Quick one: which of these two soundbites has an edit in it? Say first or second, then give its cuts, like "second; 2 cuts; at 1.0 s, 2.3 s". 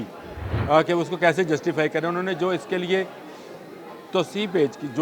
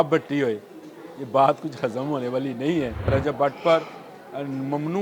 second; 1 cut; at 3.1 s